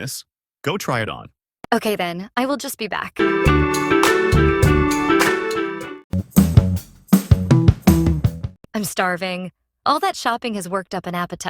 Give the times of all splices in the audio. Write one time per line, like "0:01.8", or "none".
0:03.2
0:06.2